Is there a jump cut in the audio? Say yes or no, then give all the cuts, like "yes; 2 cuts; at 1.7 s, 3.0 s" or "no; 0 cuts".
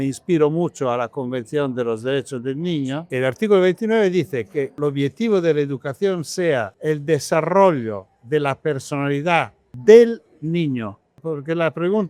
yes; 5 cuts; at 3.0 s, 4.7 s, 6.7 s, 9.7 s, 11.2 s